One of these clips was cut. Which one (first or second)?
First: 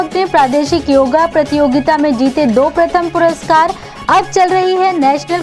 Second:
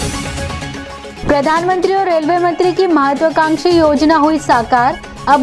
second